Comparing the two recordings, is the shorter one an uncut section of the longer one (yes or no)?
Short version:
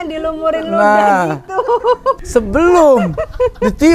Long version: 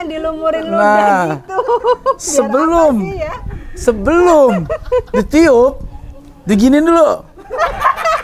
no